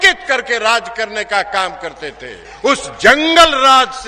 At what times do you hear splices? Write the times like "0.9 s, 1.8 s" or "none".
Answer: 2.4 s